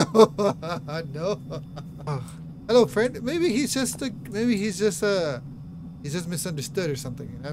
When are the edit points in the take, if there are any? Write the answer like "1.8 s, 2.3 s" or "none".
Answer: 2.1 s